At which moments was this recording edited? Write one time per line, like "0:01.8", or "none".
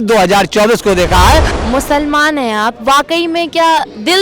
0:01.5